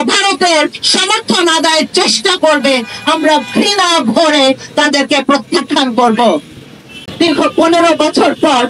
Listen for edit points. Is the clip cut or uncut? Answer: cut